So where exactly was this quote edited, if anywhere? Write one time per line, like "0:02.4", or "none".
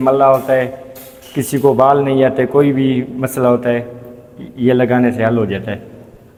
none